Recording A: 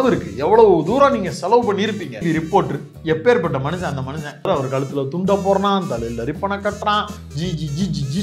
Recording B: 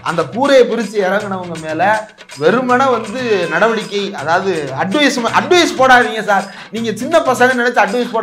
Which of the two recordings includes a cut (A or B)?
A